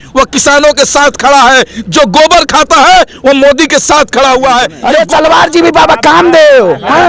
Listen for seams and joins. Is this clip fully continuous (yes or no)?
no